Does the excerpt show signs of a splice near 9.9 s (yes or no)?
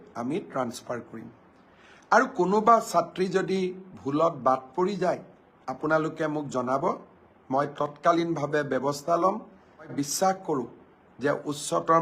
yes